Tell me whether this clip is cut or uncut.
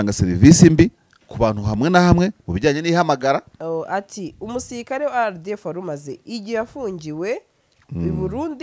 cut